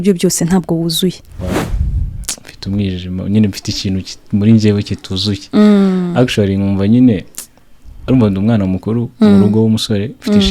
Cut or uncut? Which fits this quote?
cut